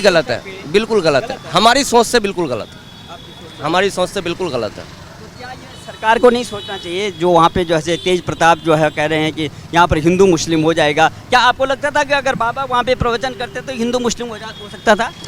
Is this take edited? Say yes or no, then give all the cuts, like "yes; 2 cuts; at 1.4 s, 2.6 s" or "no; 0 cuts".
no; 0 cuts